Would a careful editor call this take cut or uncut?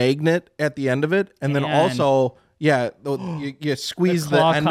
uncut